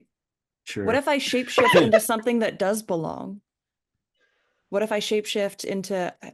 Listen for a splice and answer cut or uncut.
uncut